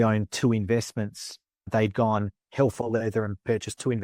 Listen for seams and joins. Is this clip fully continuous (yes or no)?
no